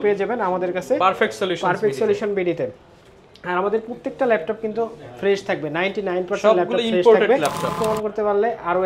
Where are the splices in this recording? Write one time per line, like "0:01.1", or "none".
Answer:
0:07.7